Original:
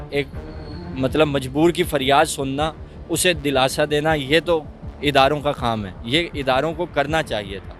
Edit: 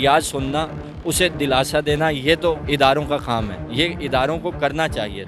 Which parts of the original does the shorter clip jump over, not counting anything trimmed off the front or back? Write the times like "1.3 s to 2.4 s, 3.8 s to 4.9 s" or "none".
4.7 s to 5.0 s